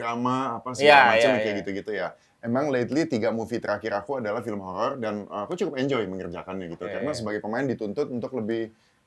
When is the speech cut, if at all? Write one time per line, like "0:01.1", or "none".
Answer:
none